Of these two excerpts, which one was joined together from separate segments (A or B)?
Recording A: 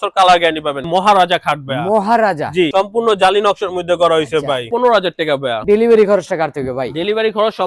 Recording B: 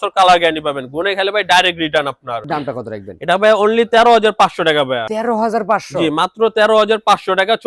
A